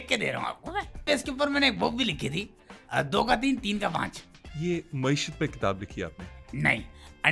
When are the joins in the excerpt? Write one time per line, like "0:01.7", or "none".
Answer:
0:01.0

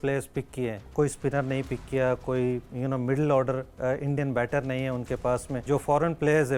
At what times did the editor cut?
0:00.8
0:05.6

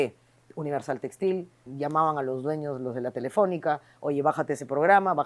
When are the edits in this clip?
0:01.6

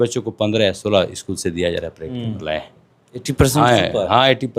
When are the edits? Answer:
0:02.4

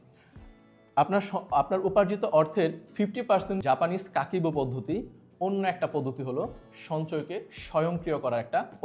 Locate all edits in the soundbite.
0:03.6

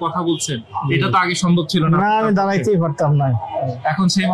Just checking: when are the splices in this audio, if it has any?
none

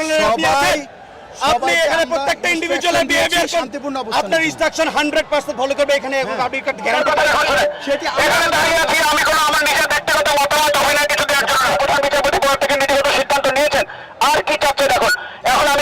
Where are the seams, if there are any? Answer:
0:07.0
0:11.8

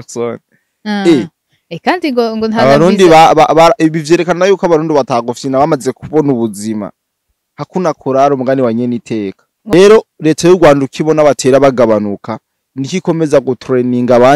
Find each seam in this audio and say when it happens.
0:09.7

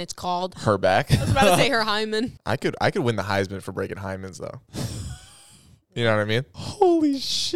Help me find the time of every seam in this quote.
0:02.4
0:06.5

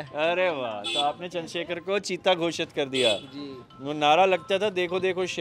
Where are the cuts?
none

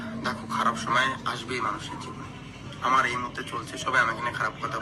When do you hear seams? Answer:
none

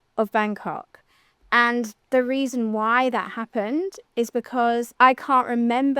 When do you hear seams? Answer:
0:04.9

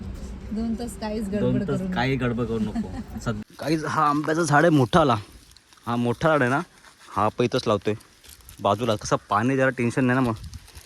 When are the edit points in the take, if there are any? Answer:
0:03.4

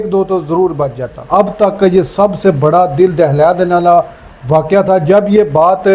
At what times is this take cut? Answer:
0:01.2

